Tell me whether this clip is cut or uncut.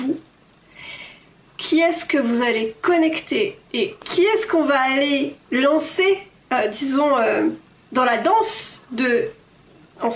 cut